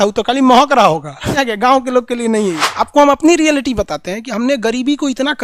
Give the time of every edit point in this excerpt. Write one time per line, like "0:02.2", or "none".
0:01.4
0:02.6